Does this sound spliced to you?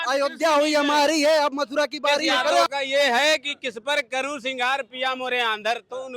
yes; 1 cut; at 2.6 s

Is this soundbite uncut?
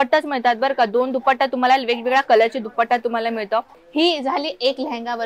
no; 1 cut; at 3.7 s

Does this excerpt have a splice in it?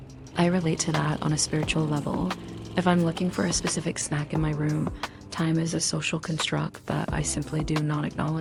no; 0 cuts

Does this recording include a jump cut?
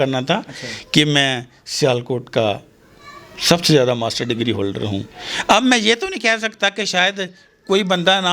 no; 0 cuts

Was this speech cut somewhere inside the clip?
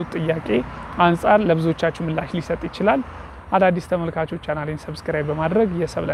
yes; 1 cut; at 3.3 s

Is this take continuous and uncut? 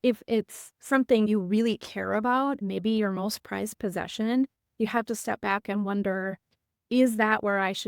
no; 2 cuts; at 1.3 s, 2.6 s

